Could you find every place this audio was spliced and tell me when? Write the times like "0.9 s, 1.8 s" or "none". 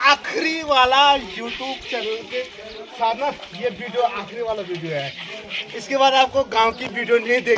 none